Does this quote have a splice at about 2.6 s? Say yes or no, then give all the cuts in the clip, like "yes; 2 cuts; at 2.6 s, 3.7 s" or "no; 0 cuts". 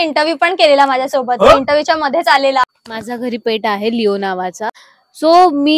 yes; 2 cuts; at 2.6 s, 4.6 s